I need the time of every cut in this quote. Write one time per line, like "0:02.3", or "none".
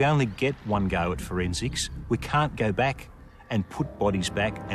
none

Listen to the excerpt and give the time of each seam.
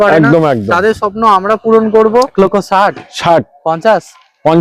0:02.3

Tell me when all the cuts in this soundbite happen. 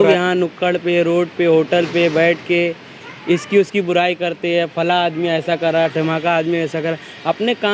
none

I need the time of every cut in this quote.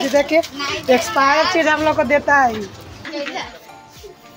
0:03.0

